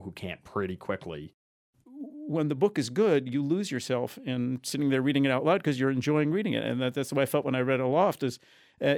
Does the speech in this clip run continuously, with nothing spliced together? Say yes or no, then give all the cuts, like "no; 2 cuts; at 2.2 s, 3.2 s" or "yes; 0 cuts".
no; 1 cut; at 1.5 s